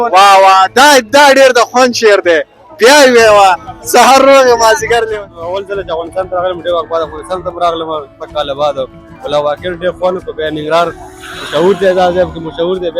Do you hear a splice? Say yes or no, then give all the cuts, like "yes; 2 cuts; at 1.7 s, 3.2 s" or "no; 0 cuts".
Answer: yes; 1 cut; at 5.1 s